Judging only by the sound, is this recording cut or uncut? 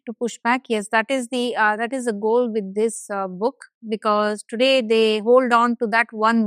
uncut